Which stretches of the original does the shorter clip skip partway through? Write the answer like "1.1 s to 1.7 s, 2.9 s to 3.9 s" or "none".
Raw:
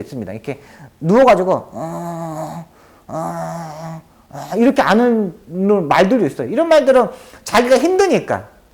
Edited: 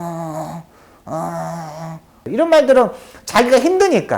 4.2 s to 6.4 s